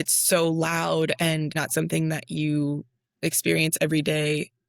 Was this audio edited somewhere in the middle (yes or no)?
yes